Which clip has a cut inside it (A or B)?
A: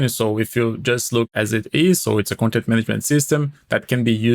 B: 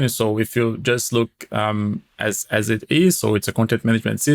A